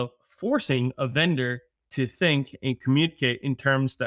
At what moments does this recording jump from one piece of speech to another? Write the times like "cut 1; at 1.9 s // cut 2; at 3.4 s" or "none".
none